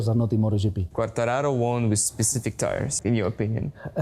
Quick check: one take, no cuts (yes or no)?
no